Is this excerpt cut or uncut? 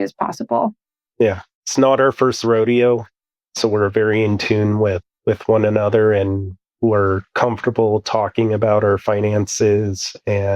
cut